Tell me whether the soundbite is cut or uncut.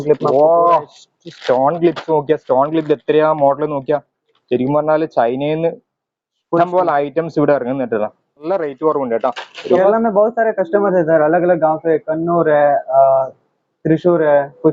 cut